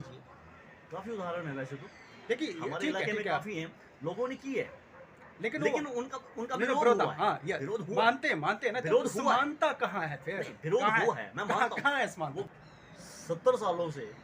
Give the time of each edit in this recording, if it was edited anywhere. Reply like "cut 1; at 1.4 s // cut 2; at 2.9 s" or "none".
cut 1; at 12.5 s